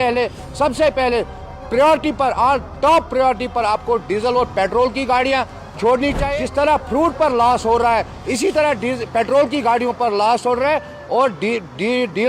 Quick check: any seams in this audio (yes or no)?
yes